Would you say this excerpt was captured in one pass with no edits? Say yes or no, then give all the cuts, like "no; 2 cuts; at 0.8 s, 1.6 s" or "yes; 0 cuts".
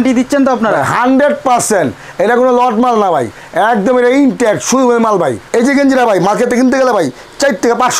no; 1 cut; at 5.4 s